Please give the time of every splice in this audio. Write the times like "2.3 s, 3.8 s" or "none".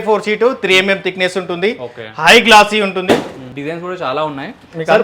none